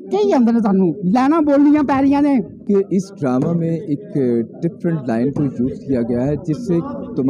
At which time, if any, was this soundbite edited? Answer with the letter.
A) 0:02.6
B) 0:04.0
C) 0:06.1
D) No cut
A